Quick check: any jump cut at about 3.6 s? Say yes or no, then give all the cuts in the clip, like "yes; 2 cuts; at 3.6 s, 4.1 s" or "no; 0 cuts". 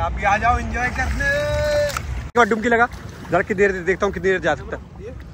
no; 1 cut; at 2.1 s